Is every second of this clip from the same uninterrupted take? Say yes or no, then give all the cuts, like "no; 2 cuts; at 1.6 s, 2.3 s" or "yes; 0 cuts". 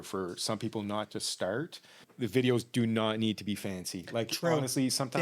no; 1 cut; at 2.0 s